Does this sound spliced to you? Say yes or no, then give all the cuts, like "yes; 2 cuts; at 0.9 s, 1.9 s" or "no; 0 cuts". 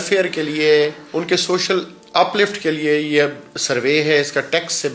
yes; 1 cut; at 1.0 s